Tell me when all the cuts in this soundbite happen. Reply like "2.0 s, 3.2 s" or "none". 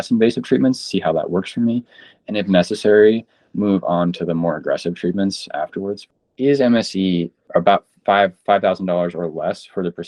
6.0 s, 7.4 s